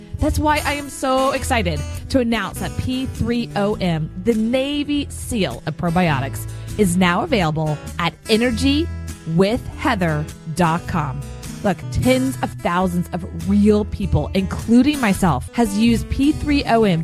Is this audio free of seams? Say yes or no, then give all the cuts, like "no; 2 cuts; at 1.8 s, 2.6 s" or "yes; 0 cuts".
no; 2 cuts; at 11.9 s, 15.4 s